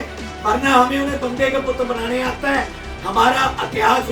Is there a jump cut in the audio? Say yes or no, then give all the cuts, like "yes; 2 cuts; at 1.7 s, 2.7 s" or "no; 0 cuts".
no; 0 cuts